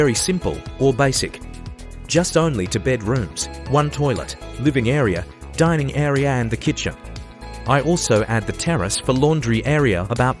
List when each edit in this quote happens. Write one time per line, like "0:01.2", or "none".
none

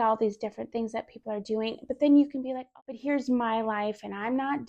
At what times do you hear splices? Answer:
0:02.6

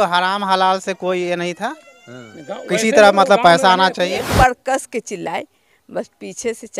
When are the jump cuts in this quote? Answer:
0:04.3

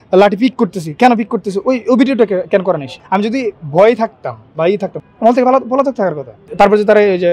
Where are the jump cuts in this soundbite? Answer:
0:02.9
0:05.0
0:06.4

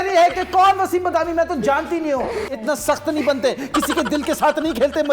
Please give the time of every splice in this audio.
0:02.6

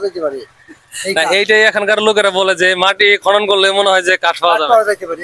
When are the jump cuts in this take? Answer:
none

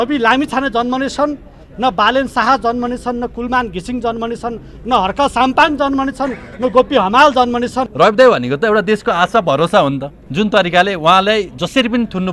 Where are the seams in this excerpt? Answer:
0:07.8

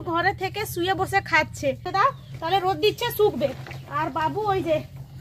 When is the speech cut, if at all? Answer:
0:01.8

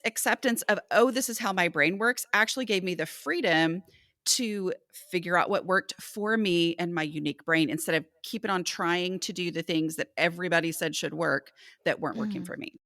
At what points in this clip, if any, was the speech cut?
none

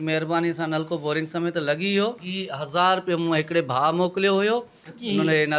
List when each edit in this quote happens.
0:02.3

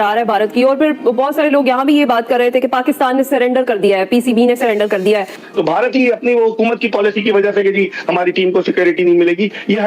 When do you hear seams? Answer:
0:05.4

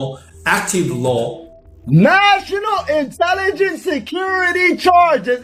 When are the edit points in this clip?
0:01.5

